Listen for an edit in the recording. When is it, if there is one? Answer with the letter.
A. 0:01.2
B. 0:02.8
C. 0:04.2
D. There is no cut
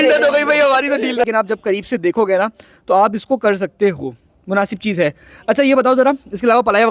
A